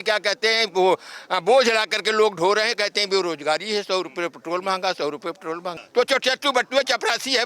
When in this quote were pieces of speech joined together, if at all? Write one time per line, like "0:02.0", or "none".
0:05.7